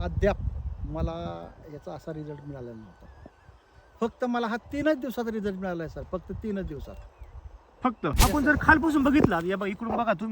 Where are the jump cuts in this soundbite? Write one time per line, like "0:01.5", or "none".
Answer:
0:08.1